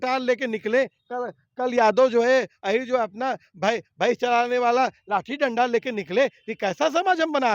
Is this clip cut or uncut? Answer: uncut